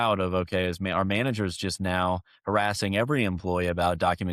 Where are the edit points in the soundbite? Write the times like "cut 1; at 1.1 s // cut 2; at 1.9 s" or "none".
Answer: none